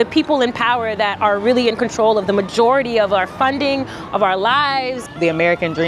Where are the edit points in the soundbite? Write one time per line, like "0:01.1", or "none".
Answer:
0:05.0